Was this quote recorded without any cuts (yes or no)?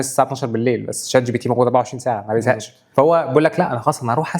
no